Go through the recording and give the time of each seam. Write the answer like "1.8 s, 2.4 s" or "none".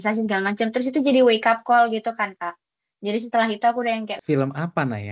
4.2 s